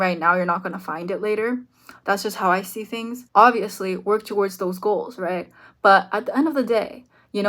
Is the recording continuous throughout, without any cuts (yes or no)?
yes